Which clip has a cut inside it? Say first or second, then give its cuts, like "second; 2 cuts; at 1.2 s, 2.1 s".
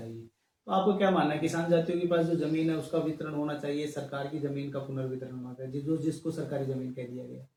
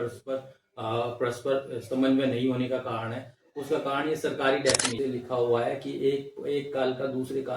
second; 1 cut; at 4.9 s